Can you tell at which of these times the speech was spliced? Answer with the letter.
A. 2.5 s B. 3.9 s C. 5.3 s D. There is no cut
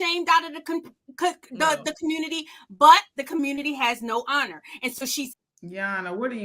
C